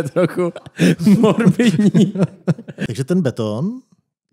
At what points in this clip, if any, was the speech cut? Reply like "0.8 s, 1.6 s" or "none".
2.7 s